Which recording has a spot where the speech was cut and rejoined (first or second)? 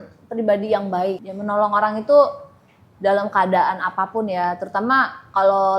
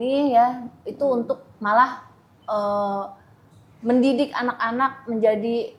first